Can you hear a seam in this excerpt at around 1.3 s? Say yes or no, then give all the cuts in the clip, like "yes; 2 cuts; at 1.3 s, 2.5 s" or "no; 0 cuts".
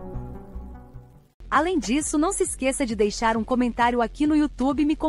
yes; 1 cut; at 1.3 s